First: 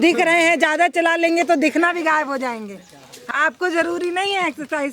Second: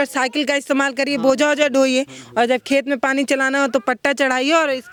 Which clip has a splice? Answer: first; 1 cut; at 3.3 s

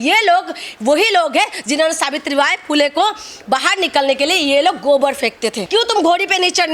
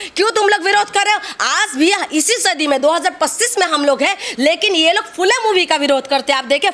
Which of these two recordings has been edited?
first; 1 cut; at 5.6 s

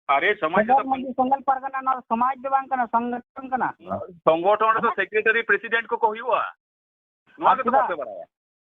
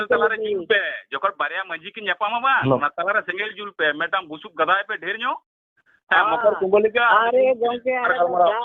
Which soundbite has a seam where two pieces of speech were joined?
first; 1 cut; at 4.0 s

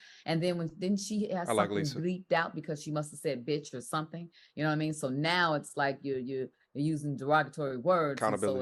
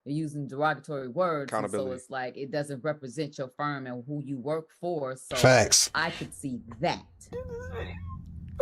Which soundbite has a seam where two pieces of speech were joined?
second; 1 cut; at 7.2 s

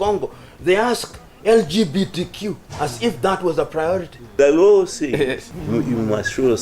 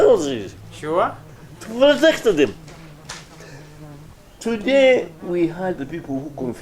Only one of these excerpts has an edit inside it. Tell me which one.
first; 2 cuts; at 4.2 s, 5.5 s

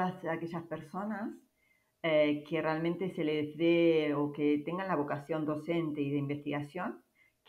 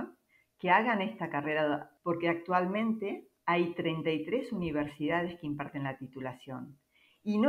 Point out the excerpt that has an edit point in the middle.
second; 1 cut; at 1.9 s

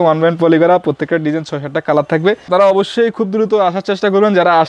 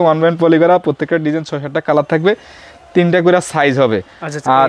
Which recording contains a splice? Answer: first; 1 cut; at 2.5 s

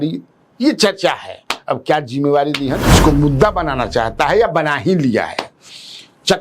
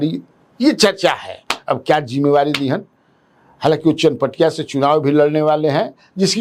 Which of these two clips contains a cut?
first; 1 cut; at 3.0 s

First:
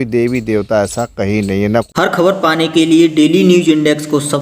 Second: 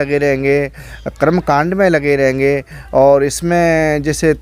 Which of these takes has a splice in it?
first; 1 cut; at 1.7 s

